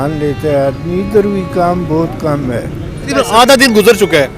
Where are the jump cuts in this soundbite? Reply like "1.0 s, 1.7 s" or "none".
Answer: 3.1 s